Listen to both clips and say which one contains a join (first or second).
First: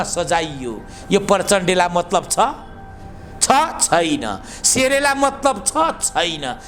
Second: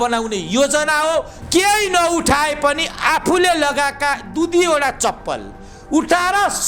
second